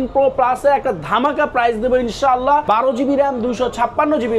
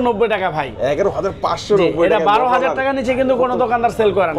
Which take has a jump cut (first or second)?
first